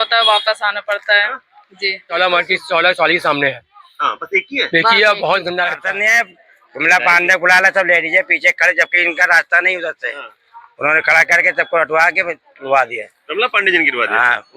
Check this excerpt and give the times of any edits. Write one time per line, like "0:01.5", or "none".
0:02.1
0:05.9